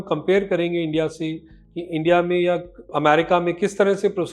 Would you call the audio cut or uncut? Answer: cut